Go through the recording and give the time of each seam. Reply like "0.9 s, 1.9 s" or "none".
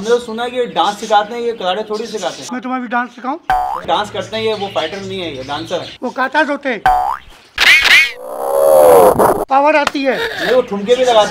2.4 s, 3.8 s, 5.9 s